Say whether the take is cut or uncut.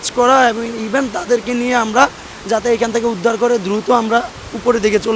uncut